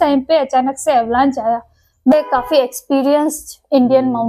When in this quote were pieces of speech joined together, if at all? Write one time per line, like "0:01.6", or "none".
0:02.1